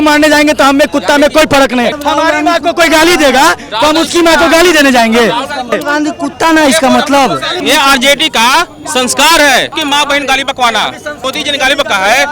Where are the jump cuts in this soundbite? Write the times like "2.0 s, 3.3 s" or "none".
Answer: 1.9 s, 5.7 s, 7.6 s, 9.8 s, 11.2 s